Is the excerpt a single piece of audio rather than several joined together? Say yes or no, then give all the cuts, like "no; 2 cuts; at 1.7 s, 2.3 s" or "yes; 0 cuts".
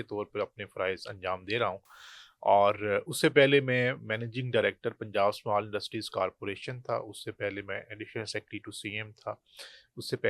yes; 0 cuts